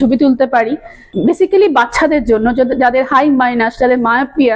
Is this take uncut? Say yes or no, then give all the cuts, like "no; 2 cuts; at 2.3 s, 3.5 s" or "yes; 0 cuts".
no; 1 cut; at 1.1 s